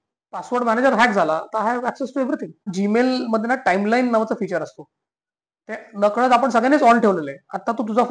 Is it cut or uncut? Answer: cut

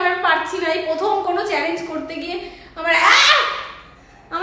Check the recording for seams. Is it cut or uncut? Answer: uncut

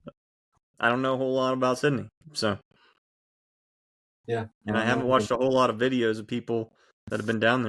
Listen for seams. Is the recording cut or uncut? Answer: uncut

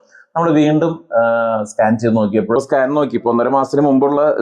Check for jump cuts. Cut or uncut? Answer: cut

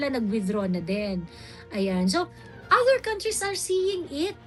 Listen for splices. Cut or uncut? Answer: uncut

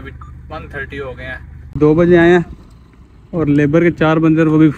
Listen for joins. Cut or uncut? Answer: cut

